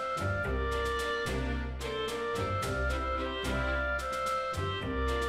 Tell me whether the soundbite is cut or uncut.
uncut